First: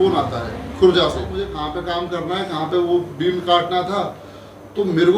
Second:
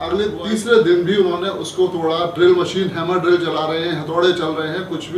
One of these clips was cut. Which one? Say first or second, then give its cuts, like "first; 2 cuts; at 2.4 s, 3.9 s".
first; 1 cut; at 1.5 s